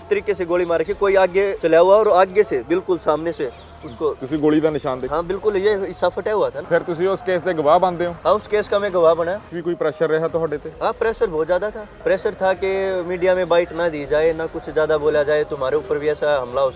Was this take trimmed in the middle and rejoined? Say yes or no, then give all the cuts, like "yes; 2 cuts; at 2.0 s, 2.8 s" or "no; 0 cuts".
yes; 4 cuts; at 1.6 s, 6.6 s, 9.5 s, 11.9 s